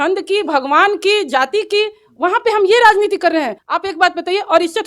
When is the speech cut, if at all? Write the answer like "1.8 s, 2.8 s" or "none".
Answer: 3.6 s